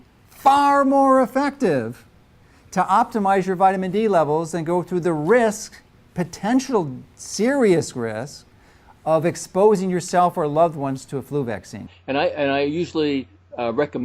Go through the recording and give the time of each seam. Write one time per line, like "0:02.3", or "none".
0:11.9